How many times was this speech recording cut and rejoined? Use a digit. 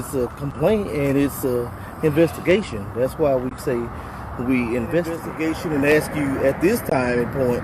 1